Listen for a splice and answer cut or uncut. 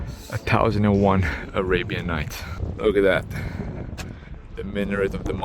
cut